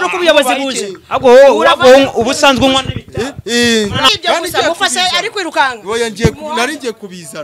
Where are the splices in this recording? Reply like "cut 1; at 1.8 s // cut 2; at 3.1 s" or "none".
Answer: cut 1; at 4.1 s